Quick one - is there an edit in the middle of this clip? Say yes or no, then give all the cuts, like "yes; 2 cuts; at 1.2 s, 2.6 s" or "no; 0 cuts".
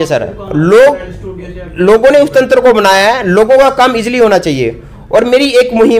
no; 0 cuts